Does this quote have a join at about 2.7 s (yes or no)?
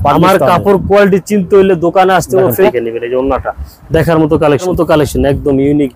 yes